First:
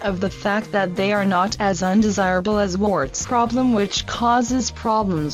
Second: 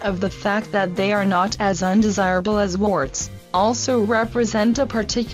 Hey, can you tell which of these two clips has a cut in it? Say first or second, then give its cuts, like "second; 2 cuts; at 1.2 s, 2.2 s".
second; 1 cut; at 3.2 s